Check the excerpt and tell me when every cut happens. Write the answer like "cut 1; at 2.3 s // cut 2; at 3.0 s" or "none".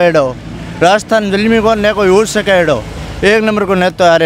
none